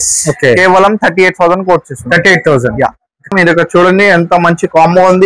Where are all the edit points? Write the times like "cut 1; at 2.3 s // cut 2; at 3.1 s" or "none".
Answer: cut 1; at 3.3 s